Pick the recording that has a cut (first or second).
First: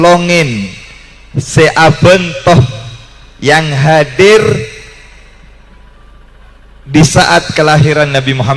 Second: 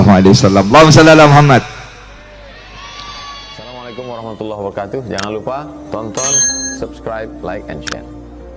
second